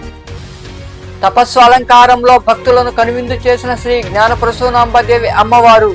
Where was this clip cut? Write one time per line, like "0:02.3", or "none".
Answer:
none